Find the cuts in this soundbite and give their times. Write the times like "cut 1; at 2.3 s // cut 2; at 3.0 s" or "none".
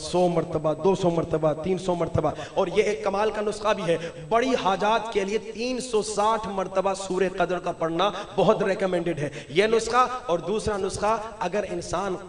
none

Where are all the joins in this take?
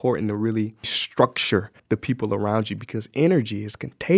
cut 1; at 1.0 s // cut 2; at 1.8 s

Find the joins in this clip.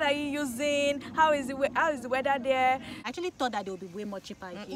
cut 1; at 3.0 s

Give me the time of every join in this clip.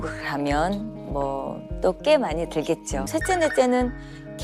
cut 1; at 3.1 s

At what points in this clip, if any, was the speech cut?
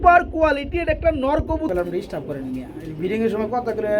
cut 1; at 1.7 s

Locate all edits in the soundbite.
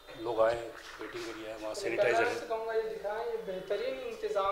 none

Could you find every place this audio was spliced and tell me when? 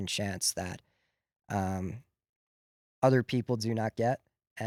none

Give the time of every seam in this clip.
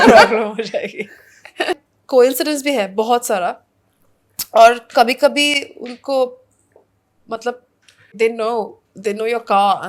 cut 1; at 1.8 s // cut 2; at 8.1 s

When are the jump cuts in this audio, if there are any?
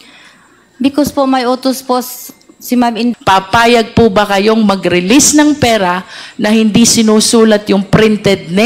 cut 1; at 3.1 s

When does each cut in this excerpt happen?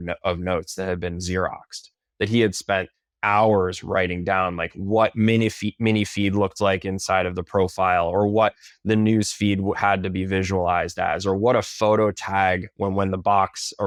none

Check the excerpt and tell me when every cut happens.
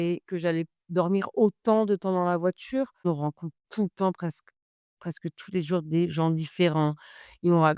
cut 1; at 3.1 s

